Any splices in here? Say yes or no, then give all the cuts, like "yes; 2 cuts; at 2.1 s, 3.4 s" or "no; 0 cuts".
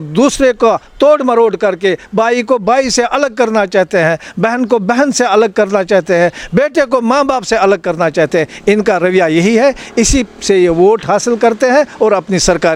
no; 0 cuts